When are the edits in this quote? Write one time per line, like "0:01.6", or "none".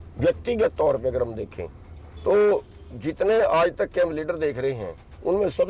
none